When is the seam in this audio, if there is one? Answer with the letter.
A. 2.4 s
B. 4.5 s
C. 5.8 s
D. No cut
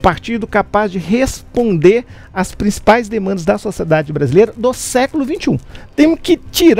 C